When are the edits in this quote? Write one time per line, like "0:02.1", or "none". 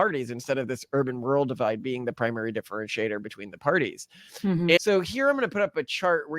0:04.8